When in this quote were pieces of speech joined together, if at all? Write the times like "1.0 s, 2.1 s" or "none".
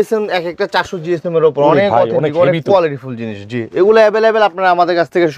none